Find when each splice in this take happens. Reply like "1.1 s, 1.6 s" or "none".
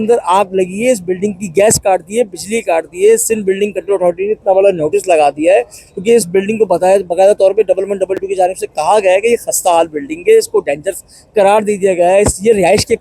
none